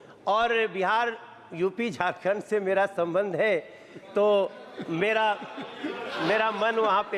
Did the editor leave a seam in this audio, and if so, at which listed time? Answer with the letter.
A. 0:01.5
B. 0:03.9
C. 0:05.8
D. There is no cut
D